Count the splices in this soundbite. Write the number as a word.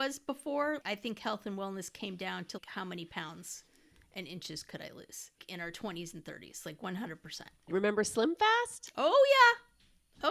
four